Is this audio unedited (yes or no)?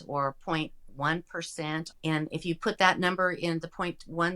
no